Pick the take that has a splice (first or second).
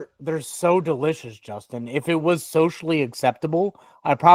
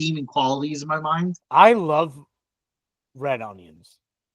second